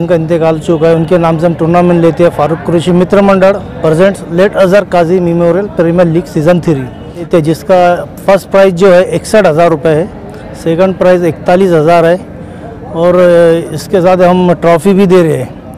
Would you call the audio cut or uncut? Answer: cut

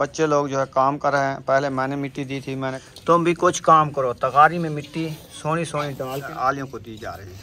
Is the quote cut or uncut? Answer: cut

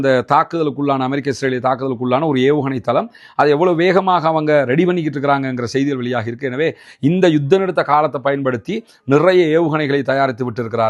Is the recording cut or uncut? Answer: uncut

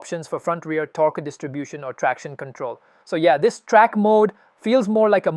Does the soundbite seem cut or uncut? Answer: uncut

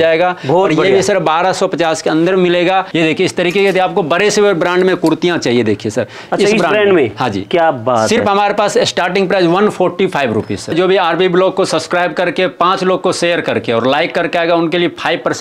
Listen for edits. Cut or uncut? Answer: cut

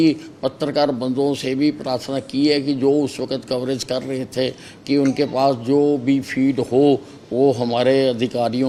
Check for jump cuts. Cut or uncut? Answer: uncut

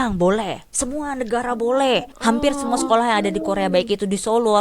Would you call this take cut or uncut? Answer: cut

